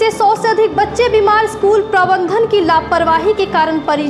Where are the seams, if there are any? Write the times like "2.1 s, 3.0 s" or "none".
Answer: none